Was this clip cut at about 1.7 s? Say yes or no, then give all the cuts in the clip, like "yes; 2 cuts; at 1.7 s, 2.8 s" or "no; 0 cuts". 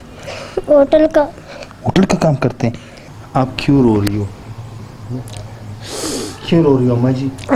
no; 1 cut; at 3.1 s